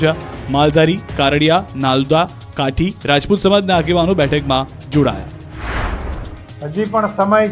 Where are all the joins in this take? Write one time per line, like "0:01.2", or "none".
0:02.4